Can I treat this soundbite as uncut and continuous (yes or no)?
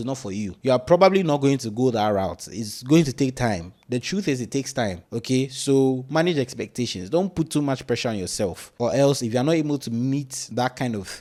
yes